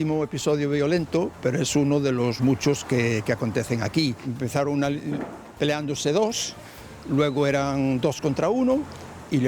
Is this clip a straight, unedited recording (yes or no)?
no